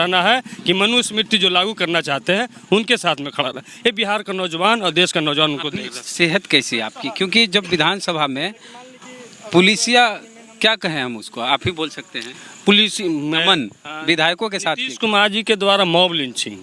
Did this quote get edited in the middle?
no; 0 cuts

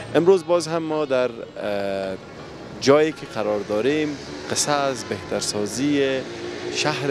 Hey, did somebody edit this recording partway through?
no; 0 cuts

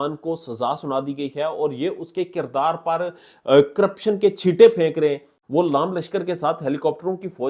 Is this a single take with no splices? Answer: no; 1 cut; at 5.3 s

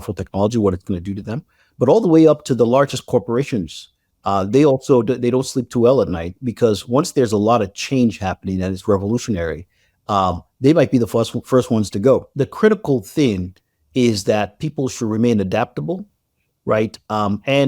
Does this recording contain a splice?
yes; 1 cut; at 12.3 s

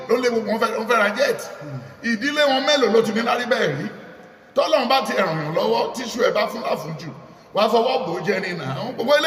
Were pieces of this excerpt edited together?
no; 0 cuts

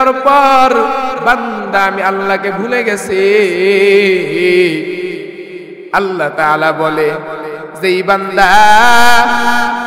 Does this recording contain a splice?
no; 0 cuts

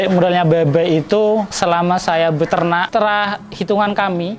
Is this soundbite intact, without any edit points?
no; 2 cuts; at 1.5 s, 2.9 s

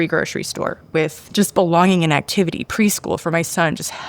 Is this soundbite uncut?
no; 1 cut; at 1.2 s

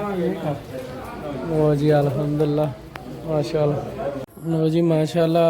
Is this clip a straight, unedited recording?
no; 1 cut; at 4.3 s

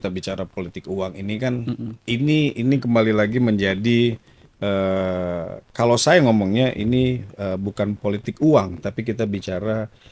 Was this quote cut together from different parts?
no; 0 cuts

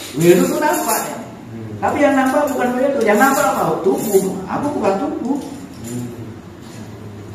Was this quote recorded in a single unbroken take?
yes; 0 cuts

